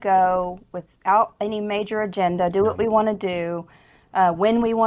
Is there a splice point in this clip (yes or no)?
no